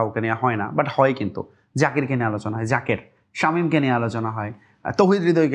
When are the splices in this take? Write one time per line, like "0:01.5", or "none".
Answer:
none